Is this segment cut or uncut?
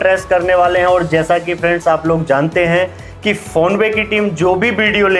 uncut